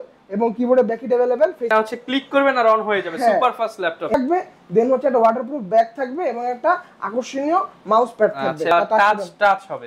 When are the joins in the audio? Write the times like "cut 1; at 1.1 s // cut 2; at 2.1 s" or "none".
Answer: cut 1; at 1.7 s // cut 2; at 4.1 s // cut 3; at 8.7 s